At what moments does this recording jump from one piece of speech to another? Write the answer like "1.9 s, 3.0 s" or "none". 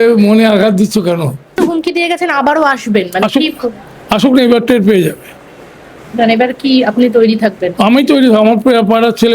1.5 s

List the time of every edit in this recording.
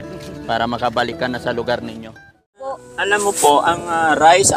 2.7 s

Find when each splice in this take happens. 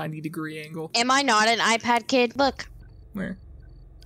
2.3 s

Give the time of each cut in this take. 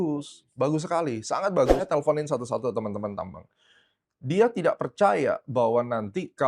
1.8 s

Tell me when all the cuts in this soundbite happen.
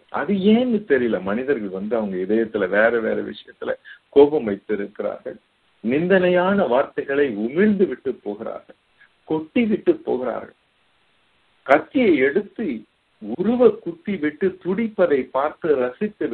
none

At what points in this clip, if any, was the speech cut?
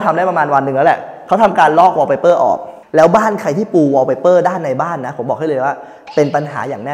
2.7 s

